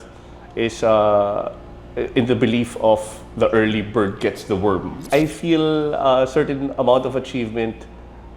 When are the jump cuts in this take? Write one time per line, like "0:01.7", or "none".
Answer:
0:05.0